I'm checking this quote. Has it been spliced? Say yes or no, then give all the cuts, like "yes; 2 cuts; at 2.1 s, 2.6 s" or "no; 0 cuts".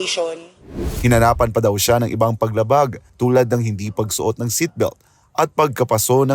yes; 1 cut; at 0.9 s